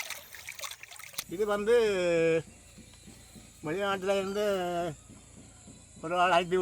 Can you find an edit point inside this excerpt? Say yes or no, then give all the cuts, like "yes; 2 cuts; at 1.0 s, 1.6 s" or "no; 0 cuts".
yes; 1 cut; at 1.2 s